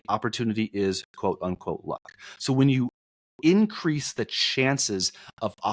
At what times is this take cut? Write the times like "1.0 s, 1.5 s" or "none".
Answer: none